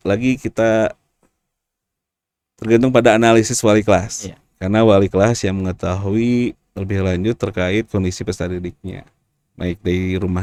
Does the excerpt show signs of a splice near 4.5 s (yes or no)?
no